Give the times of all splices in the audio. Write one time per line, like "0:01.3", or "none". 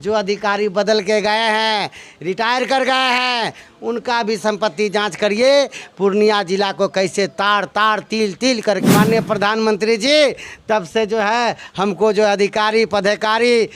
0:08.8